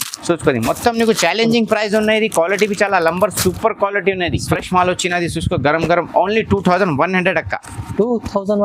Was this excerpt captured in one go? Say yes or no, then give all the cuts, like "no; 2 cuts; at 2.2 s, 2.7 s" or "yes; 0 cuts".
no; 1 cut; at 4.5 s